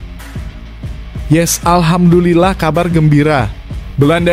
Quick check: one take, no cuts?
no; 1 cut; at 1.3 s

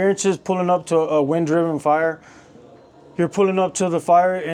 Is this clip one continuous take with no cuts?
yes; 0 cuts

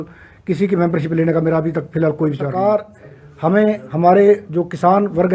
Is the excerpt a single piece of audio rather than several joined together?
no; 1 cut; at 2.5 s

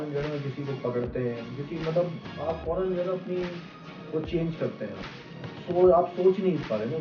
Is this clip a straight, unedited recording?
no; 1 cut; at 5.6 s

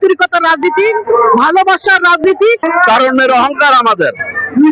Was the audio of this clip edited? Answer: yes; 1 cut; at 2.7 s

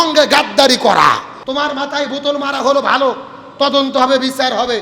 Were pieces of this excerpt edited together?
yes; 1 cut; at 1.3 s

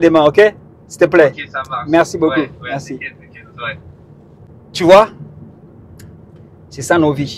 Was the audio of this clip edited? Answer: yes; 1 cut; at 4.5 s

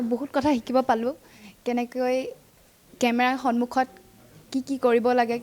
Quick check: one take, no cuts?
yes; 0 cuts

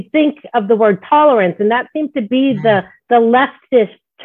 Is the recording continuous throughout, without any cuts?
yes; 0 cuts

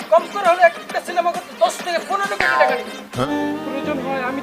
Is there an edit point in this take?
yes; 1 cut; at 3.2 s

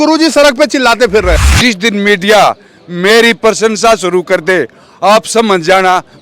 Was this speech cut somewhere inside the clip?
yes; 1 cut; at 1.3 s

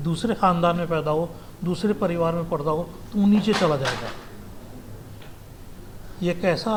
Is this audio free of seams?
yes; 0 cuts

